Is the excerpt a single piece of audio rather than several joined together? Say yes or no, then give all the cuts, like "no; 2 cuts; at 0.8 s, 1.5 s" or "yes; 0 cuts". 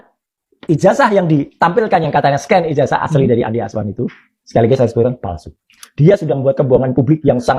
yes; 0 cuts